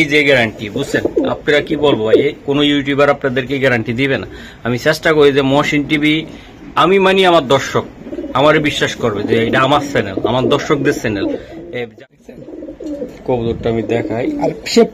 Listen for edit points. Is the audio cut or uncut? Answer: cut